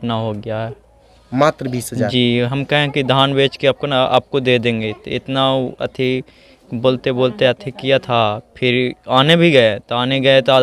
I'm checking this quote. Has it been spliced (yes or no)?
no